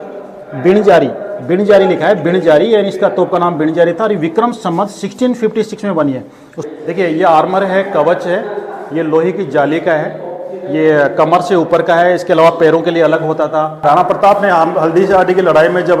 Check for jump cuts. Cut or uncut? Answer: cut